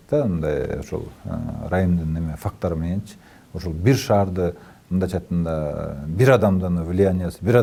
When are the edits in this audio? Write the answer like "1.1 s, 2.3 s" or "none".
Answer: none